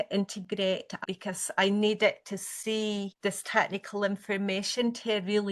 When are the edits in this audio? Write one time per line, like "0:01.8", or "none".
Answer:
0:01.0
0:03.1